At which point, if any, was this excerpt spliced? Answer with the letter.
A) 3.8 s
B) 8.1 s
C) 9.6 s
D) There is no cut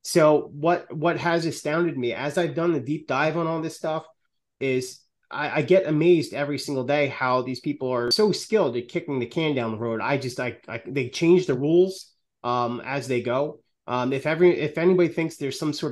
B